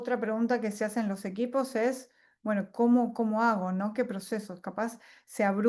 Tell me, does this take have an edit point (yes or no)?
no